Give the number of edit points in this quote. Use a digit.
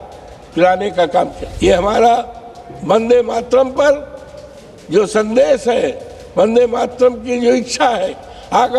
1